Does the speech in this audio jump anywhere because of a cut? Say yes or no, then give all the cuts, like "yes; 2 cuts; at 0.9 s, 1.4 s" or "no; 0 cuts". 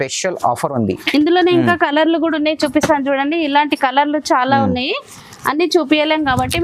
no; 0 cuts